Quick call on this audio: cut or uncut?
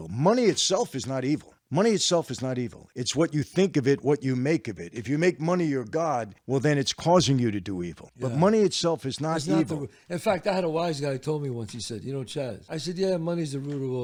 uncut